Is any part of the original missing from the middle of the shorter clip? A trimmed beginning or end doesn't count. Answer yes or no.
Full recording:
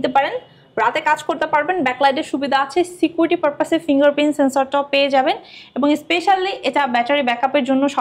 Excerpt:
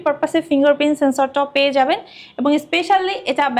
no